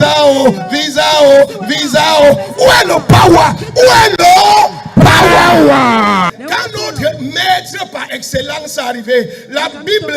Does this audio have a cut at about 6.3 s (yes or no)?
yes